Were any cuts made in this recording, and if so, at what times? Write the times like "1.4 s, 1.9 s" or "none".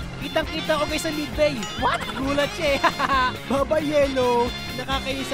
none